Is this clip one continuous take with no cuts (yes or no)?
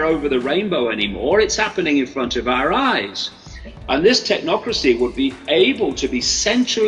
yes